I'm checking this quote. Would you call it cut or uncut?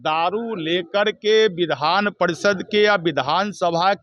uncut